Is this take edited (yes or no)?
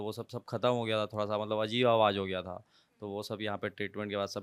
no